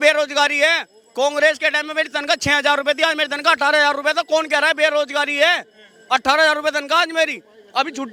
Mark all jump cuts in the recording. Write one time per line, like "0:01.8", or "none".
none